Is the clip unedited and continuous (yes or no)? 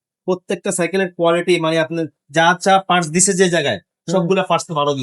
yes